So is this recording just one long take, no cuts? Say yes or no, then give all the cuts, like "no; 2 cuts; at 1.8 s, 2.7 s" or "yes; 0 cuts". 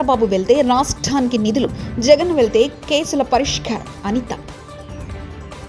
yes; 0 cuts